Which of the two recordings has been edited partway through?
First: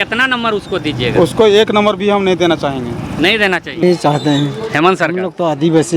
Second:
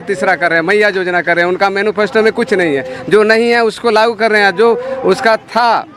first; 1 cut; at 3.8 s

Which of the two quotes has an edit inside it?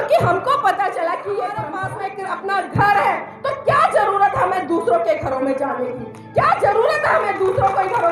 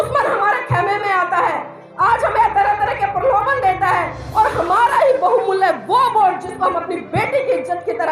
first; 1 cut; at 1.8 s

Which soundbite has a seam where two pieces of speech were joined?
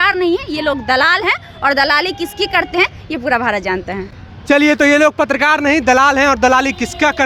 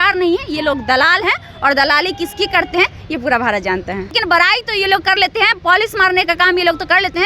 second; 1 cut; at 4.2 s

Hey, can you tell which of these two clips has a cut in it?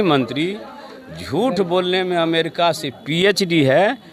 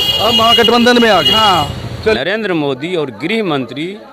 second; 1 cut; at 2.2 s

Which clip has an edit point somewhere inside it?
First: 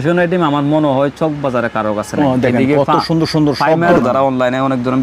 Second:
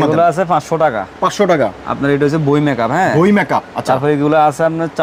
first; 1 cut; at 4.0 s

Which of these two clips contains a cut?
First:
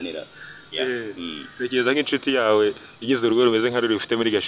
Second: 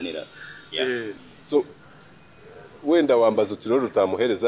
second; 1 cut; at 1.1 s

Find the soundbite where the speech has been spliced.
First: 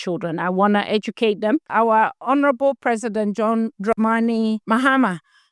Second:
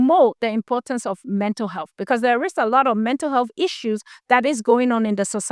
first; 3 cuts; at 2.0 s, 3.8 s, 4.6 s

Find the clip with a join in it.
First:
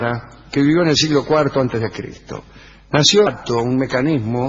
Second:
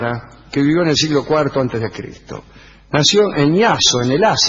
second; 1 cut; at 3.3 s

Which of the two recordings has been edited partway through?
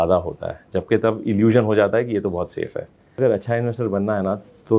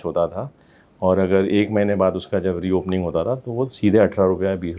first; 1 cut; at 3.2 s

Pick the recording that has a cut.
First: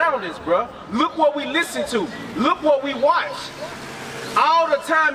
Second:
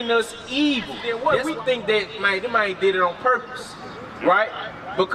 second; 1 cut; at 1.0 s

